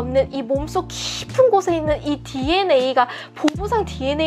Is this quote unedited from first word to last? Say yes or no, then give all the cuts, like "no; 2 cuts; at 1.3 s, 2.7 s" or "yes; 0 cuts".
yes; 0 cuts